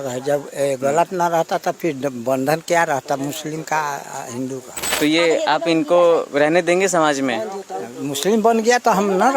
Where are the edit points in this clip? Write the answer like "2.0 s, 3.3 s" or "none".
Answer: 5.0 s